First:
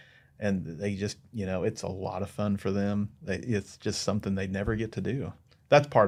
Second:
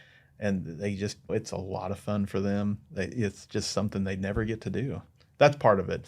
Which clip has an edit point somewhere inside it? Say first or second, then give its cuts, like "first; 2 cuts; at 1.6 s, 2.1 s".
second; 1 cut; at 1.3 s